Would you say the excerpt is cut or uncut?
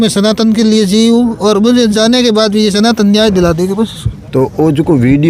uncut